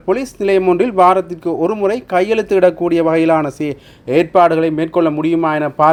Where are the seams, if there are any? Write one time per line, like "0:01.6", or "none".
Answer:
none